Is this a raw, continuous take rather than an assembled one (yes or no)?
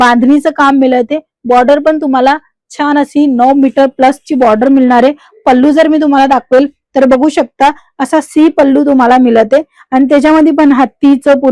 yes